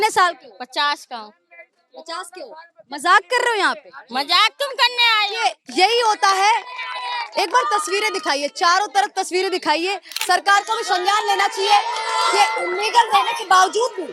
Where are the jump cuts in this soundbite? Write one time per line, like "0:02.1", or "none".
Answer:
0:10.1